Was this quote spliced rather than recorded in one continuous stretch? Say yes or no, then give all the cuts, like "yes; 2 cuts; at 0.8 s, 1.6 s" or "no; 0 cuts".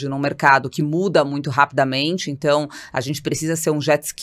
no; 0 cuts